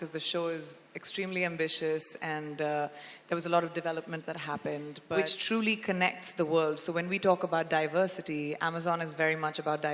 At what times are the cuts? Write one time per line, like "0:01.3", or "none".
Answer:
0:05.0